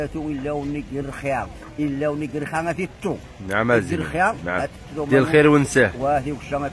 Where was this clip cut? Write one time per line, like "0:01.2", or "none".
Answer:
none